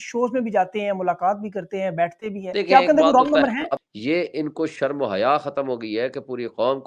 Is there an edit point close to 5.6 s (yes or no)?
no